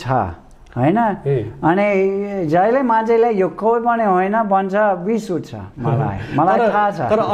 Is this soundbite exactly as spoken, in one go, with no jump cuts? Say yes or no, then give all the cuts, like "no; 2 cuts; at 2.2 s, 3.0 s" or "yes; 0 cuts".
yes; 0 cuts